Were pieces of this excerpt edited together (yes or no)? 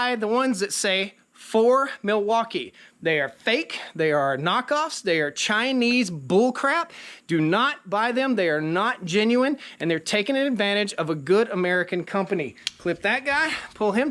yes